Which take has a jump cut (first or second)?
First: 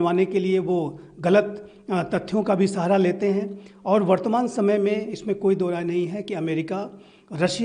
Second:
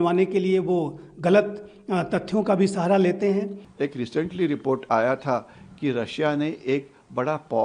second